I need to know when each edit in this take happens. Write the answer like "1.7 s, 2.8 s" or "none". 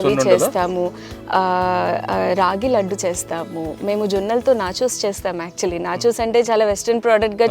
none